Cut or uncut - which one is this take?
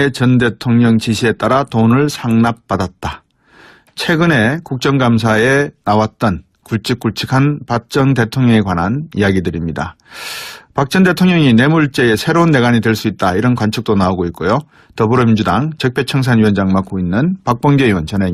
uncut